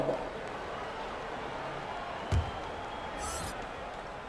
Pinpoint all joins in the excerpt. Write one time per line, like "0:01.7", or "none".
none